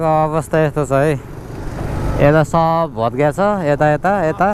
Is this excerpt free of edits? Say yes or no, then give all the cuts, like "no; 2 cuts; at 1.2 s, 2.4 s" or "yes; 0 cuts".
yes; 0 cuts